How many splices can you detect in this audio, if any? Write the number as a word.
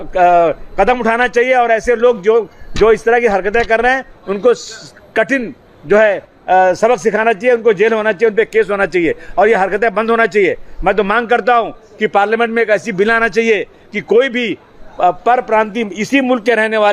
zero